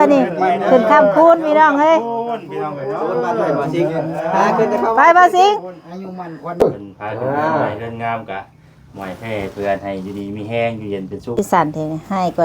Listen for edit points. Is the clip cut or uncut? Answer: cut